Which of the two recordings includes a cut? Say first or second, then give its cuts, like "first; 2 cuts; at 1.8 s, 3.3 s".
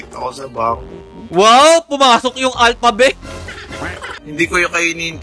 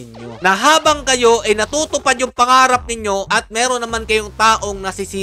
first; 1 cut; at 4.1 s